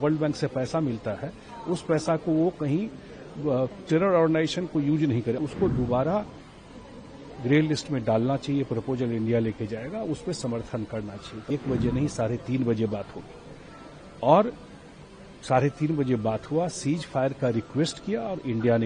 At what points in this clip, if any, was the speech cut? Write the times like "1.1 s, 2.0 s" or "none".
5.4 s, 11.5 s